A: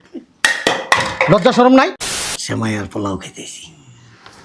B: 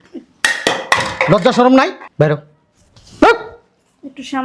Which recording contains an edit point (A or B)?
A